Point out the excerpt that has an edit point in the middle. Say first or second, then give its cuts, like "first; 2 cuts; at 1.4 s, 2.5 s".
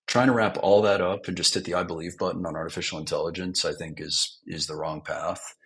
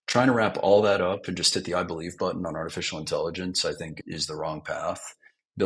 second; 1 cut; at 4.0 s